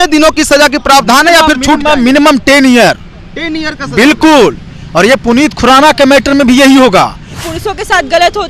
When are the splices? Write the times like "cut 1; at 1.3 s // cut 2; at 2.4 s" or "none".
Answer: cut 1; at 7.3 s